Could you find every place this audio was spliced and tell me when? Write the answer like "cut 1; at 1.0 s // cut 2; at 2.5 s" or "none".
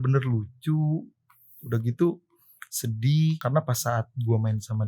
cut 1; at 3.4 s